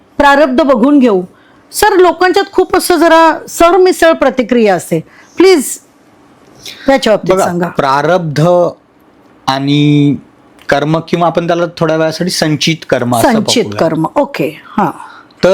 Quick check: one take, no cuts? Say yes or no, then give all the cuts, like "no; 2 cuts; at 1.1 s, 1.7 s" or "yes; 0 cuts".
yes; 0 cuts